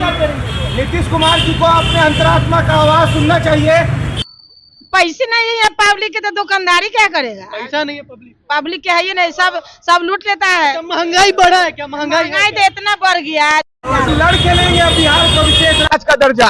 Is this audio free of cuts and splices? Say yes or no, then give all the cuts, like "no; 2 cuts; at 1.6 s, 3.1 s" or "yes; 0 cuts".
no; 2 cuts; at 4.1 s, 14.1 s